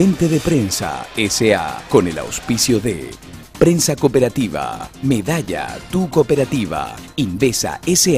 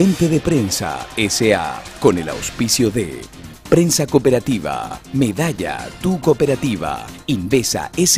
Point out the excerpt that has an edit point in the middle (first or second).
first